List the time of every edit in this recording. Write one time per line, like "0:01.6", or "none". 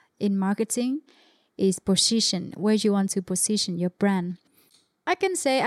0:04.5